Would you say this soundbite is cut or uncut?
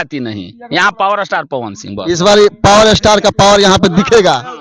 uncut